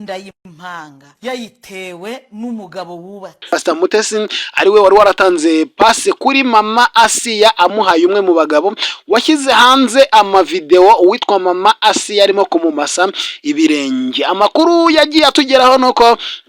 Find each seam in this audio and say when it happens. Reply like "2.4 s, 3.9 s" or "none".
3.6 s